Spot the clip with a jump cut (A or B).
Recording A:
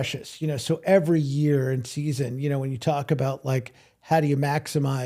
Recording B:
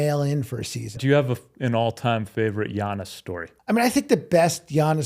B